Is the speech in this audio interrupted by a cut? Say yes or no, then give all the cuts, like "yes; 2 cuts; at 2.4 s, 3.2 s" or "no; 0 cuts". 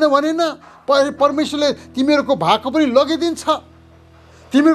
no; 0 cuts